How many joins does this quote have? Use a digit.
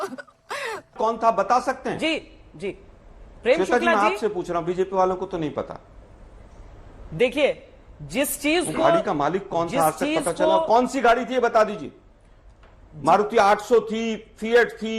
1